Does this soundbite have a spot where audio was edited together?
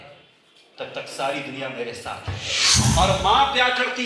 yes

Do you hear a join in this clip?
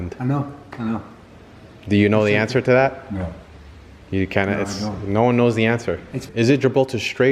yes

